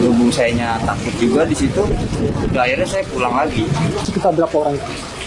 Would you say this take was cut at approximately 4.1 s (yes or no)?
yes